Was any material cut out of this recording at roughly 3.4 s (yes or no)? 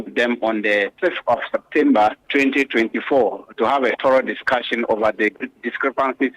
no